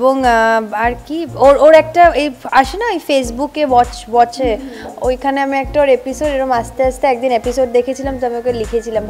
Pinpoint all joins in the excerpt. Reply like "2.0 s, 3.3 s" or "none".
none